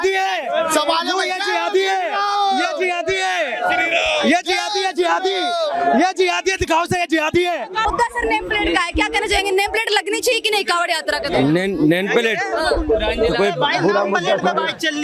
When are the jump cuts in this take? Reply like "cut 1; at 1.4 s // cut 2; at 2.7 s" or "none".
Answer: none